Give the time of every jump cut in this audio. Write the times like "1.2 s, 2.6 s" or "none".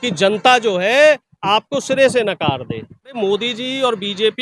3.2 s